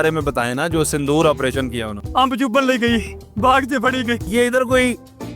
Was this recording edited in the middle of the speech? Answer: yes; 3 cuts; at 1.9 s, 3.2 s, 4.3 s

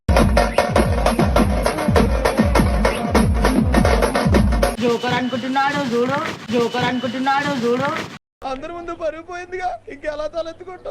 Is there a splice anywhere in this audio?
yes; 1 cut; at 4.8 s

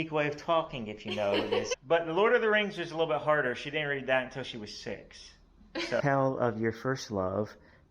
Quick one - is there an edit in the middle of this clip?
yes; 2 cuts; at 1.7 s, 6.0 s

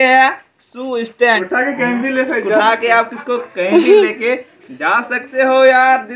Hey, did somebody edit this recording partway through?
yes; 1 cut; at 1.3 s

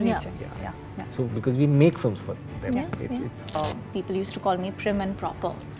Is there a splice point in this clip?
yes; 1 cut; at 3.6 s

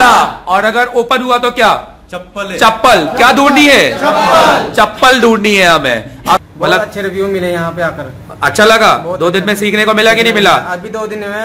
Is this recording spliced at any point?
yes; 1 cut; at 6.4 s

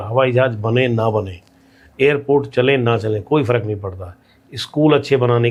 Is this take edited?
no; 0 cuts

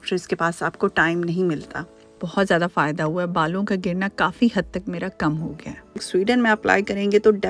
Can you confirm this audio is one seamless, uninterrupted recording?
no; 2 cuts; at 1.9 s, 6.0 s

